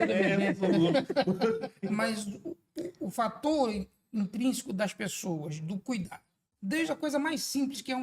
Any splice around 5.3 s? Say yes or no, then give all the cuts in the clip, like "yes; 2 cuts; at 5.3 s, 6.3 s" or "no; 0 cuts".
no; 1 cut; at 1.7 s